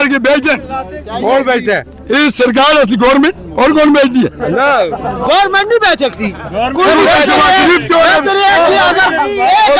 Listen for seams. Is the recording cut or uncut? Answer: uncut